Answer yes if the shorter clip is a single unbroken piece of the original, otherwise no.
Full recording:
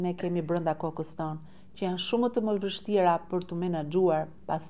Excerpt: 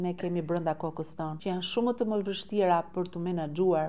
no